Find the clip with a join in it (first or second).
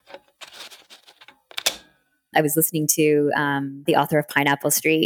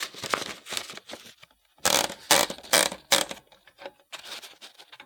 first